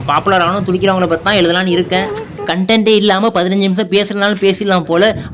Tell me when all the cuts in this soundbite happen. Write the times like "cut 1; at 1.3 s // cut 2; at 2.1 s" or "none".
cut 1; at 2.5 s